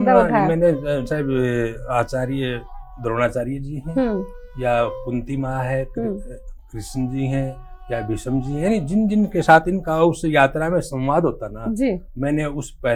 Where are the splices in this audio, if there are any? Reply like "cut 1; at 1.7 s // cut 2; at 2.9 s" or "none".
none

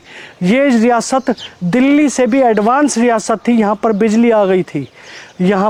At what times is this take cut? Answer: none

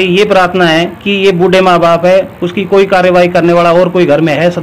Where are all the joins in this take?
none

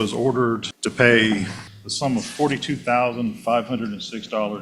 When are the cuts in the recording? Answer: none

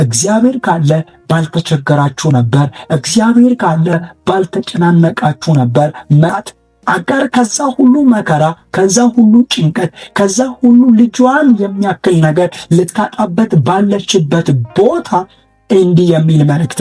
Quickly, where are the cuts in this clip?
cut 1; at 6.3 s

